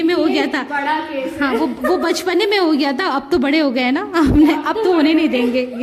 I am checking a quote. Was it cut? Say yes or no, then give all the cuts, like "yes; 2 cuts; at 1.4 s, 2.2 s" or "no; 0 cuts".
no; 0 cuts